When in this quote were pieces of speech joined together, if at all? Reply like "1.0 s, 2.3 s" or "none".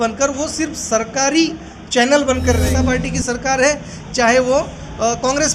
2.6 s